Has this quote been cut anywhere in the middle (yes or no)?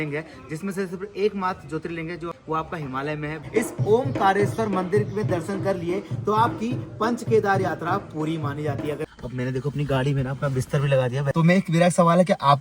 yes